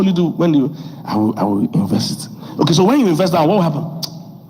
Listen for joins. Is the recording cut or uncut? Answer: cut